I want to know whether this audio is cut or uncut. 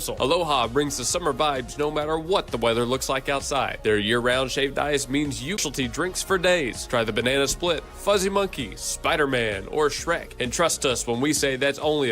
cut